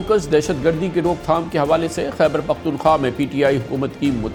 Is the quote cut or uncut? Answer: uncut